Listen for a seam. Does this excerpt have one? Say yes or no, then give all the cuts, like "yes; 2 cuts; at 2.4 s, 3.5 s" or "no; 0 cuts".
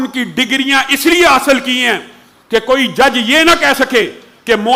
no; 0 cuts